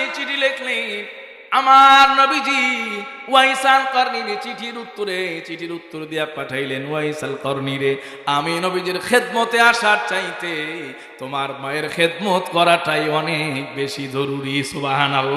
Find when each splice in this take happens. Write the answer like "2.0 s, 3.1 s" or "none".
none